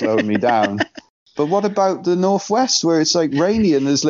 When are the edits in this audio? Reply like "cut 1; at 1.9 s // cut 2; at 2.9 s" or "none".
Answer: cut 1; at 1.1 s